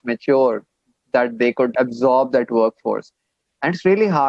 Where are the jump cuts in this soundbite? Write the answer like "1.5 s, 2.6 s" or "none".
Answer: 1.7 s